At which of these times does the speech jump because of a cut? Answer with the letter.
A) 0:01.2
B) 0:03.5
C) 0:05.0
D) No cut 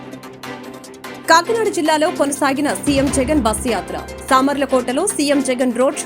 A